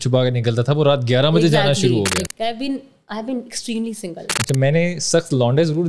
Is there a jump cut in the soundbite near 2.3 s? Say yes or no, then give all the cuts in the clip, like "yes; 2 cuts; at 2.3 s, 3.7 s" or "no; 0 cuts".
yes; 1 cut; at 2.3 s